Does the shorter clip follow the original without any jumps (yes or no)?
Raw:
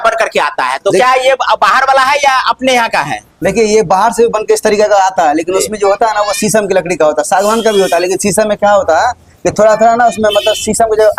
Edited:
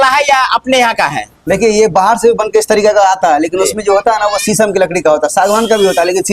yes